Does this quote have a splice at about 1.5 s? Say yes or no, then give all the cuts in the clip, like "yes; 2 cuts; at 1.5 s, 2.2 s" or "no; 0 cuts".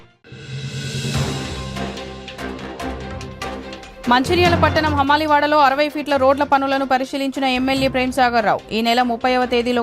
yes; 1 cut; at 1.5 s